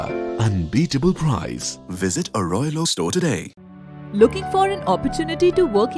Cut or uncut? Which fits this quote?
uncut